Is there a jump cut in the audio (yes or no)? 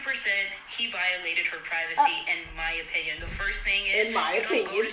no